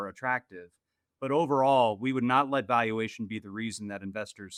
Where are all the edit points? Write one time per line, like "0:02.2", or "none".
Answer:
none